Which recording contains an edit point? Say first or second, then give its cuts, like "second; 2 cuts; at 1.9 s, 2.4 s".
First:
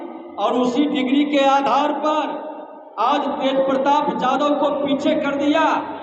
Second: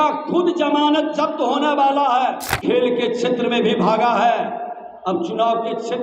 second; 1 cut; at 2.5 s